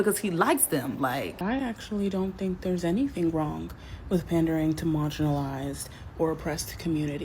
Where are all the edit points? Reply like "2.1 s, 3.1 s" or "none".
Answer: 1.3 s